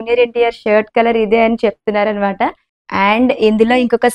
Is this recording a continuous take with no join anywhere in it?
no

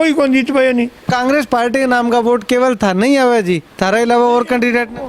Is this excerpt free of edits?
no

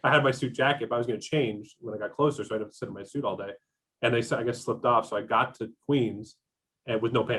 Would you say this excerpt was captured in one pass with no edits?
yes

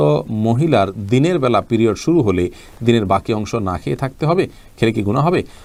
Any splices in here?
no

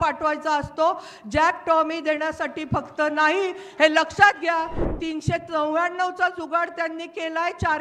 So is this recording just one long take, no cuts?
no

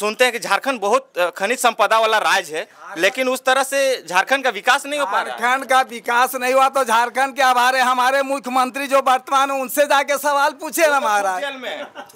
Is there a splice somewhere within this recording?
no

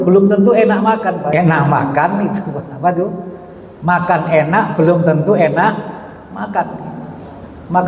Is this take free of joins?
no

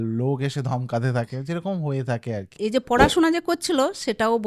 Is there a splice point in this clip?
yes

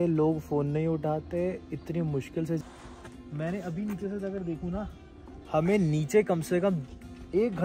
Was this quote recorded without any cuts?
no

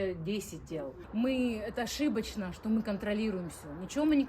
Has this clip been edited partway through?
yes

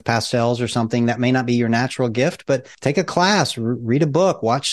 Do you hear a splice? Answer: yes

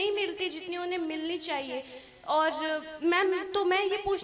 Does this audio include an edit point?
no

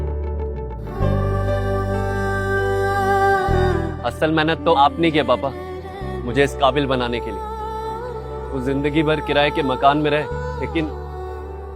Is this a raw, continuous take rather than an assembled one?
no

